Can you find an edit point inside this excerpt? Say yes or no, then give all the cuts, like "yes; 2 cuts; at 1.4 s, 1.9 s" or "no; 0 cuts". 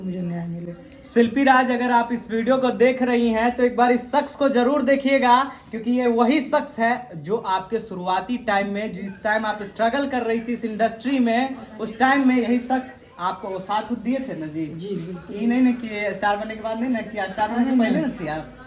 no; 0 cuts